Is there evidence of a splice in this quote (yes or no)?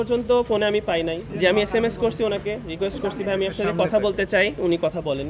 no